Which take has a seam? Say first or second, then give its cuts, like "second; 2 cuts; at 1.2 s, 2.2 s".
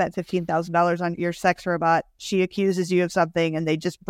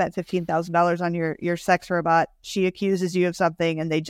first; 1 cut; at 1.1 s